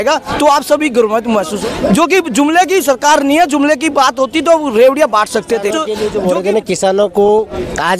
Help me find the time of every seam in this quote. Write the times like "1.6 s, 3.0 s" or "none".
1.6 s, 5.8 s